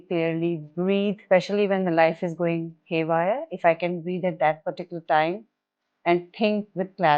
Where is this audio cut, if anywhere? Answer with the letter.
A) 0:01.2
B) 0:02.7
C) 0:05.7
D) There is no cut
A